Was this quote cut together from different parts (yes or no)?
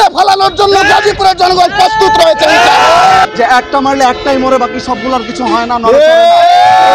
yes